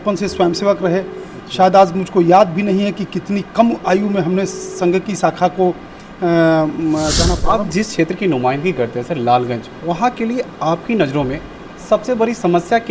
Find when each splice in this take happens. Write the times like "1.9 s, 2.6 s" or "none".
7.4 s